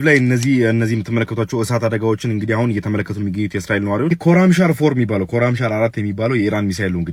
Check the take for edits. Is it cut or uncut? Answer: uncut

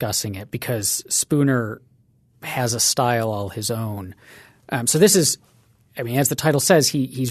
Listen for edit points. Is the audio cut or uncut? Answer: uncut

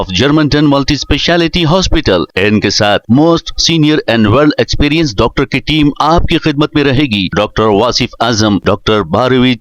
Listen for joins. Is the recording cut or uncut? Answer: uncut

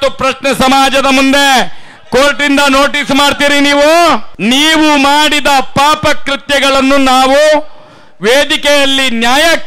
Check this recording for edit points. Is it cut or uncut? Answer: cut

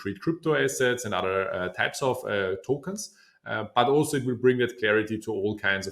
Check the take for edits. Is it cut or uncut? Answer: uncut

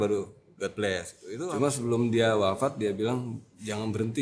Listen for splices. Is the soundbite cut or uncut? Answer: cut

